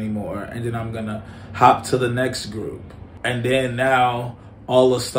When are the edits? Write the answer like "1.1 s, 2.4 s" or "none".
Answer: 3.1 s